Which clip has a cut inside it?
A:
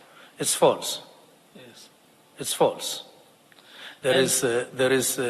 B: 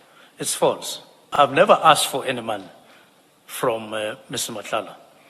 B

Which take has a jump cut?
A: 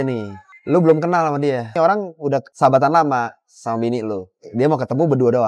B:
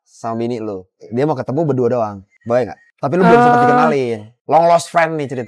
A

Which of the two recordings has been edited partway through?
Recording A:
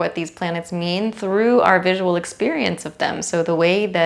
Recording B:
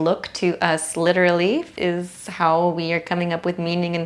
B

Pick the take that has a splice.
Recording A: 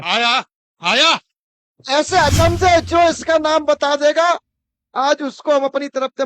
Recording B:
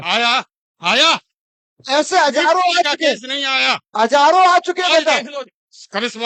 A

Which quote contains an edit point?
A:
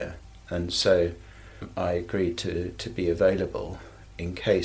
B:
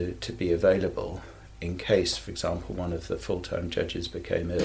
A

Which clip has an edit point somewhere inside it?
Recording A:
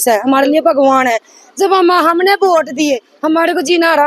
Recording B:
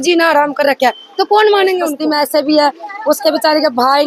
B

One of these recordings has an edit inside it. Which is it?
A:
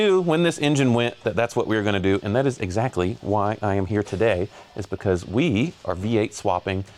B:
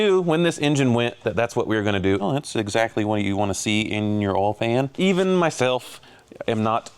B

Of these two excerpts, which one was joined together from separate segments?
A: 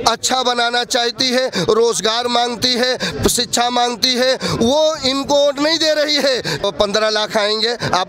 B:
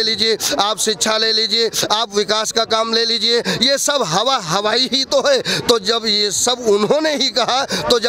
A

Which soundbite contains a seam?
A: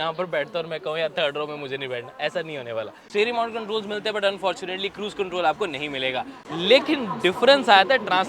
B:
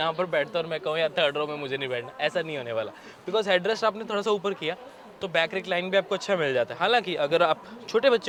A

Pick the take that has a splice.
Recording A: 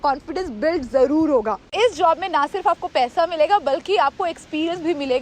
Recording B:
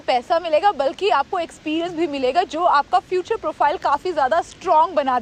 A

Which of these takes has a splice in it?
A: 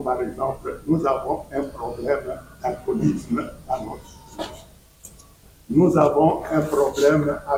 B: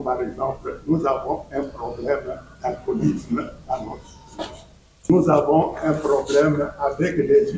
B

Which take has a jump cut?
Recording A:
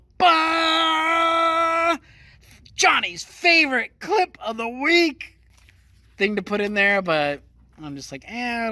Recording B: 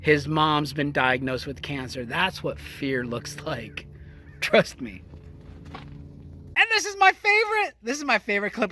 B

